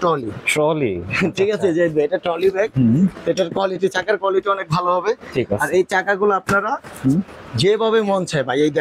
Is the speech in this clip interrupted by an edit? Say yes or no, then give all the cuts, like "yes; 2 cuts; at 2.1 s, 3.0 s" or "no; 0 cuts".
no; 0 cuts